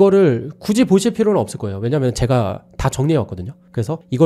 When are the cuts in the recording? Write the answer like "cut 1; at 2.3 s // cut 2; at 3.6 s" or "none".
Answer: none